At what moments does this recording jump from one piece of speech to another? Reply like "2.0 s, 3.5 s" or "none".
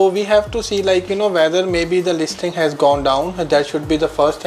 none